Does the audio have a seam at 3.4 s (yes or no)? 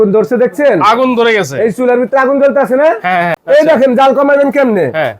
yes